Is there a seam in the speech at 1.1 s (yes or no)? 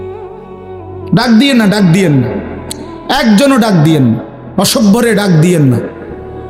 no